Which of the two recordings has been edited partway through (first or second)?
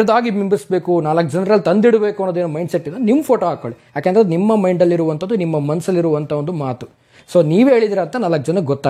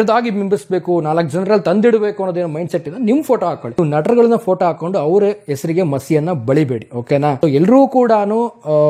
second